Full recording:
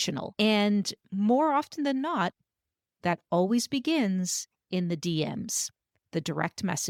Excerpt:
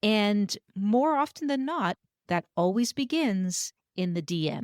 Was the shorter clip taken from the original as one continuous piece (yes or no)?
no